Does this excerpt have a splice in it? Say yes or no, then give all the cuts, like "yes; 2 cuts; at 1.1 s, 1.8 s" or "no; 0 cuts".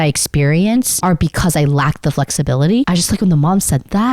yes; 2 cuts; at 0.9 s, 2.9 s